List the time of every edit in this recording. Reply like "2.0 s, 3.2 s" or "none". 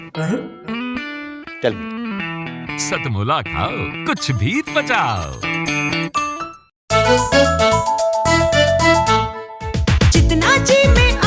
6.8 s